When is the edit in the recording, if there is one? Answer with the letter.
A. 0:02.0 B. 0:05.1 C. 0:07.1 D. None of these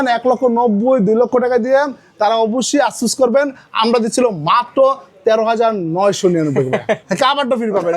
C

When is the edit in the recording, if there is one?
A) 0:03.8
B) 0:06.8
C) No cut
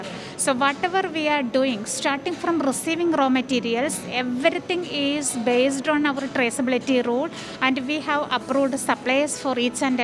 C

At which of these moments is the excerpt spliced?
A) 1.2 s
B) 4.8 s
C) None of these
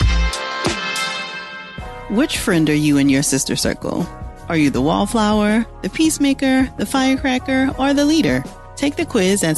A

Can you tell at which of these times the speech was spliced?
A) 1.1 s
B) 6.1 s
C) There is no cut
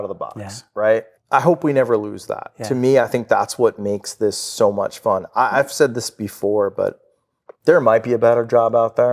A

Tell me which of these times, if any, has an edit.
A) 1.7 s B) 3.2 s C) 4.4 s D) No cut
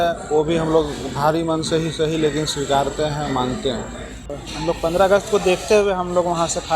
C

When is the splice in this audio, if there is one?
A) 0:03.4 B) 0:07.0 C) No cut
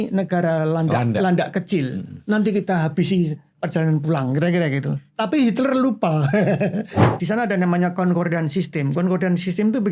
B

